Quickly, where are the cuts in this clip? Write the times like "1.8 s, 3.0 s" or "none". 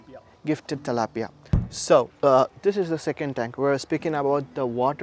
1.6 s